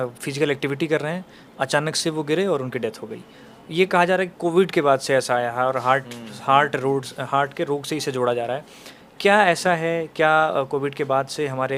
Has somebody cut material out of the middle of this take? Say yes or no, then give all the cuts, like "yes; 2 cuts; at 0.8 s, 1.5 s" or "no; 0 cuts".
no; 0 cuts